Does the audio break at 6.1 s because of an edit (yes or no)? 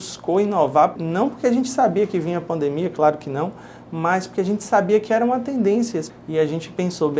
yes